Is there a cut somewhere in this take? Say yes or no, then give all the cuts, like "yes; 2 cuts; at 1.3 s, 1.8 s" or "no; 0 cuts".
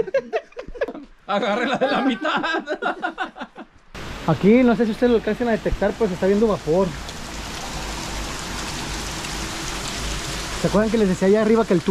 yes; 2 cuts; at 0.9 s, 4.0 s